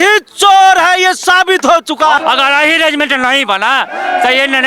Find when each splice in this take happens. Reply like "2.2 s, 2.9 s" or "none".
2.2 s